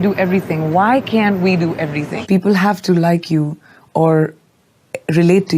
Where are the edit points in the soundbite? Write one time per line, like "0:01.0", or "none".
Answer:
0:02.1